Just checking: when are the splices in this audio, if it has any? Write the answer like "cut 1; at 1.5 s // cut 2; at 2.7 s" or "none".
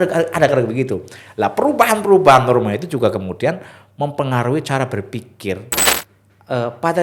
cut 1; at 5.8 s